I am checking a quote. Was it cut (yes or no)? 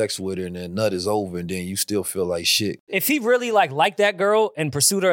yes